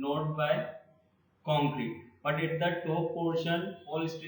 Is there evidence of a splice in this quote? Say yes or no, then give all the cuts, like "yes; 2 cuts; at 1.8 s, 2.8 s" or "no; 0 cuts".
no; 0 cuts